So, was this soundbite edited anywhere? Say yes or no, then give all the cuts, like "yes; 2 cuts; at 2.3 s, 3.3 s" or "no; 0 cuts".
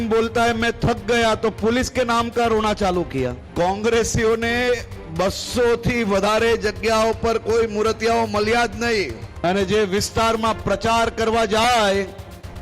yes; 2 cuts; at 3.4 s, 9.2 s